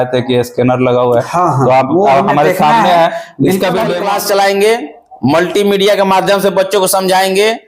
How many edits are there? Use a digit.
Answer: 1